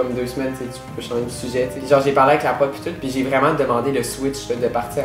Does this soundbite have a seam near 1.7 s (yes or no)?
yes